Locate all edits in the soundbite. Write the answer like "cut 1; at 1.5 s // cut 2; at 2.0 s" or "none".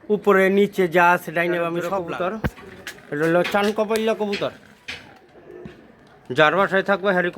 cut 1; at 1.8 s